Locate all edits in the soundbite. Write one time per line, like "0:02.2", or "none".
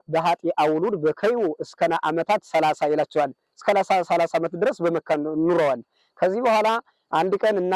none

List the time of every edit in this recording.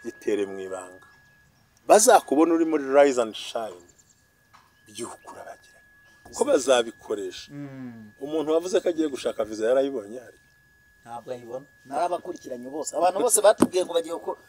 0:06.2

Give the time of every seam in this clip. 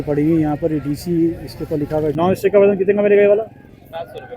0:02.1

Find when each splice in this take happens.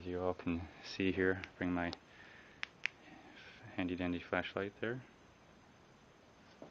0:04.1

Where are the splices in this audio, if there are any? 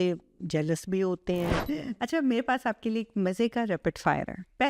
0:01.6

